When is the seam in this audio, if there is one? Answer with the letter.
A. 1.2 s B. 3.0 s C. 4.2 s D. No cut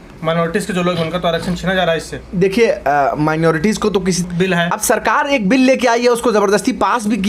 C